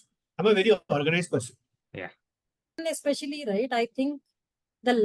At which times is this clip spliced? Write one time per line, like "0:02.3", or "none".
0:02.8